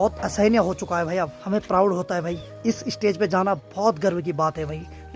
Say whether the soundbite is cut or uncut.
cut